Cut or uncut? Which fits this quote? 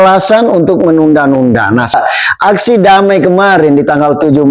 cut